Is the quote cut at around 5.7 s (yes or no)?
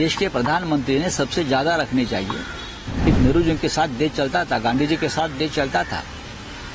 no